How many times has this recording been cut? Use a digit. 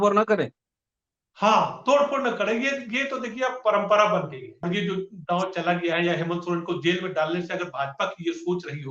1